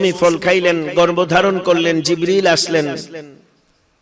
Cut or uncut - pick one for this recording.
uncut